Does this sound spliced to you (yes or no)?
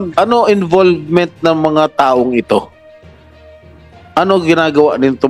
no